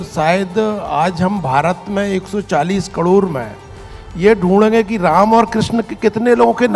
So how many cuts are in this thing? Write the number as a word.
zero